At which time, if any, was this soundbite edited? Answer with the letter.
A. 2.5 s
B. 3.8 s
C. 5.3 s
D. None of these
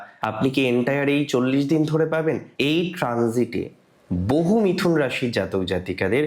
A